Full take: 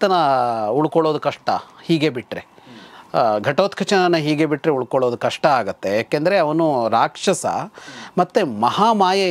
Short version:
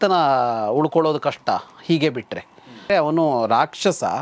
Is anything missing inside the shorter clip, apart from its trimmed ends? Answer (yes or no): yes